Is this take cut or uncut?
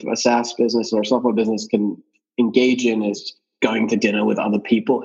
cut